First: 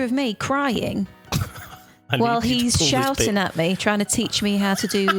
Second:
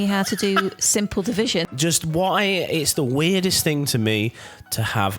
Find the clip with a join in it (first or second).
second